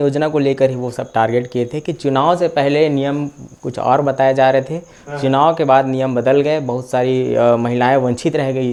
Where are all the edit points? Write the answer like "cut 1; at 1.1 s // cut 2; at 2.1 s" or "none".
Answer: none